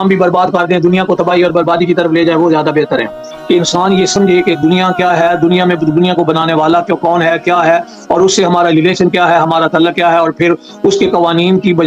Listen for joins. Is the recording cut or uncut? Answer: cut